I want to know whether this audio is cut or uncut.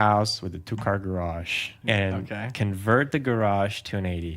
cut